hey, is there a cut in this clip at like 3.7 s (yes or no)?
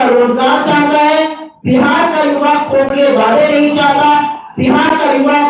no